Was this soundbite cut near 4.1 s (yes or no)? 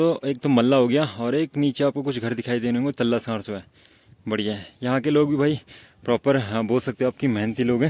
no